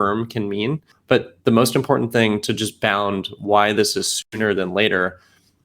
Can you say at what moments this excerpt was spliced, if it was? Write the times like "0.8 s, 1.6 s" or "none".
0.9 s